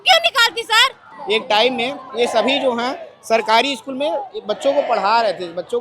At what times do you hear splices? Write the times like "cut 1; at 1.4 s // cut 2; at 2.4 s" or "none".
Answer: cut 1; at 1.1 s